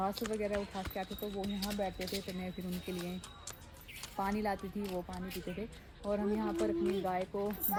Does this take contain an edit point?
no; 0 cuts

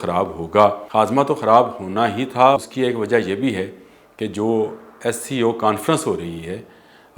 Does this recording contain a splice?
yes; 2 cuts; at 0.8 s, 2.6 s

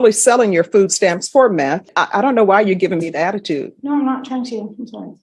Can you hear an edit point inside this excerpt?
yes; 1 cut; at 1.9 s

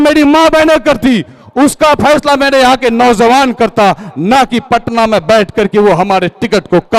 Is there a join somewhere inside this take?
no; 0 cuts

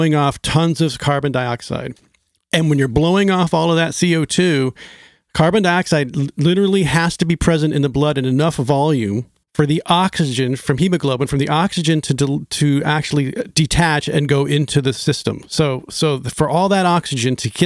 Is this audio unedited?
no; 1 cut; at 9.4 s

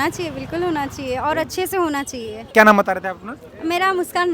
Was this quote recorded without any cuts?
yes; 0 cuts

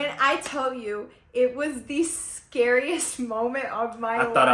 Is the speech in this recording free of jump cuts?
yes; 0 cuts

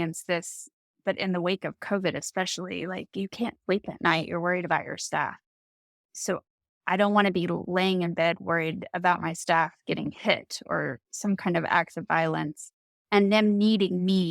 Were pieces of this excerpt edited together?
yes; 1 cut; at 6.0 s

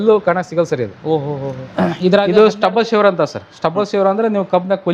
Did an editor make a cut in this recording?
yes; 1 cut; at 2.3 s

